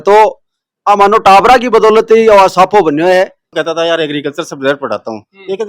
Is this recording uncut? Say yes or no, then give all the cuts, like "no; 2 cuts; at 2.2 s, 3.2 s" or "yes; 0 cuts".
no; 1 cut; at 3.5 s